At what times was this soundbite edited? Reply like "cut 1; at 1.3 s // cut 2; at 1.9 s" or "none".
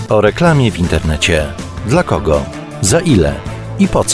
none